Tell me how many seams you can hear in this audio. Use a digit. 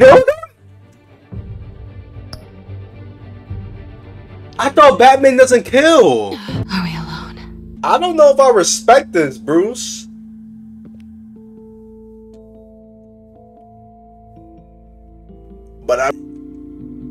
3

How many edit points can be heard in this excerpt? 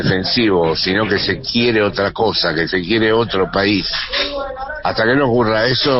0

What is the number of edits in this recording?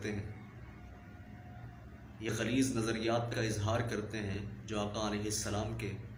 0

